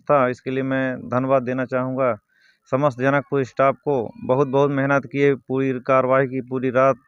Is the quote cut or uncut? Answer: uncut